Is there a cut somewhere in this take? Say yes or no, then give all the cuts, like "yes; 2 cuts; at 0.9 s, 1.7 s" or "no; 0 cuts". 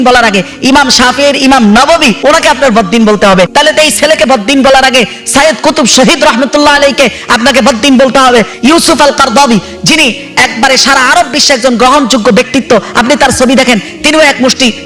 yes; 3 cuts; at 2.2 s, 3.5 s, 8.5 s